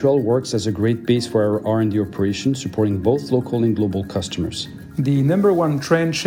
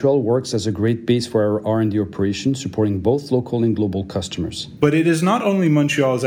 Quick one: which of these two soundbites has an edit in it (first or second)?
first